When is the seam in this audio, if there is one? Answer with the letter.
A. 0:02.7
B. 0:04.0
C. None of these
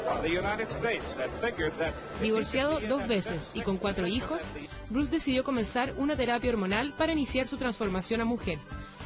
C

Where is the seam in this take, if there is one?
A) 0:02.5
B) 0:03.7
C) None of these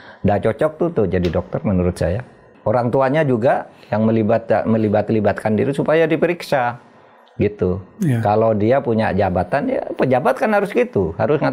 A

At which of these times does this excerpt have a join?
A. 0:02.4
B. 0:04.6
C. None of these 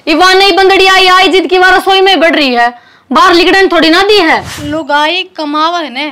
B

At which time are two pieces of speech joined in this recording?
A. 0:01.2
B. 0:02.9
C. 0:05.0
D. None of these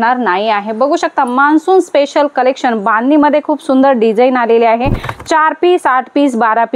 C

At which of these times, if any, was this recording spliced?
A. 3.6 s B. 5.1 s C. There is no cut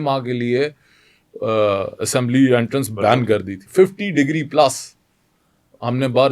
A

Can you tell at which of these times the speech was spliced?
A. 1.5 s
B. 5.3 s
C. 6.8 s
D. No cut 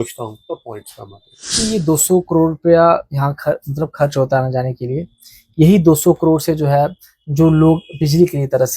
A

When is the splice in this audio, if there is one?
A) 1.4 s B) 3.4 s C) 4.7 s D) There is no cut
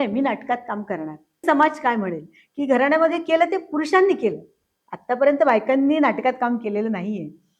A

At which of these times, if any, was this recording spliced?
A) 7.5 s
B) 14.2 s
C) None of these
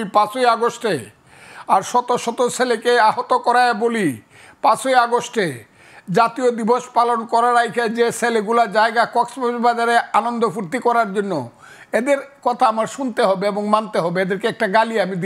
C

